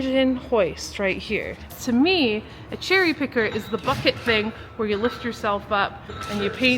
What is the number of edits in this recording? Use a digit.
1